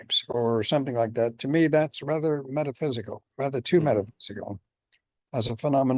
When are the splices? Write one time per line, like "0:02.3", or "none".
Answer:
none